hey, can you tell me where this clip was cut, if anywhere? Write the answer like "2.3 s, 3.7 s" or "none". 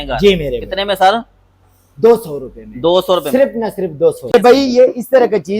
4.3 s